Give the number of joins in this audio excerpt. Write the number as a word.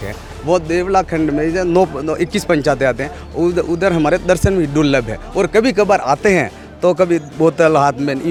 zero